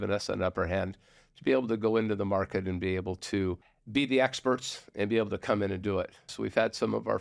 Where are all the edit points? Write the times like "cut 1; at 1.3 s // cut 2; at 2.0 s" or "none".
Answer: cut 1; at 3.7 s // cut 2; at 6.3 s